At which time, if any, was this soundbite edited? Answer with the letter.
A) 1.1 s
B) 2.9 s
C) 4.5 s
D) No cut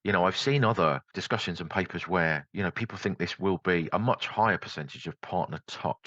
A